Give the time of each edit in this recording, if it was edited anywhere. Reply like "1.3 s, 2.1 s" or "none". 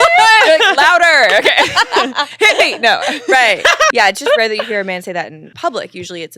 3.9 s, 5.4 s